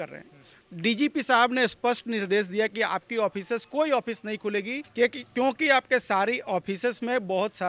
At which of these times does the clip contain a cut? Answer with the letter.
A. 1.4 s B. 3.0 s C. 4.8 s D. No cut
C